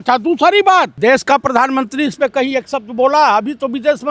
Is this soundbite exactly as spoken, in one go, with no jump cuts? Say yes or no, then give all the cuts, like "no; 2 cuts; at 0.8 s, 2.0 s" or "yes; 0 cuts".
no; 1 cut; at 0.9 s